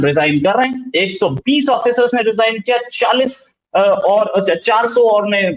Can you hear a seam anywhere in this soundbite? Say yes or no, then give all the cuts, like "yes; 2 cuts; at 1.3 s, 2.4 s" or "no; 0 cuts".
no; 0 cuts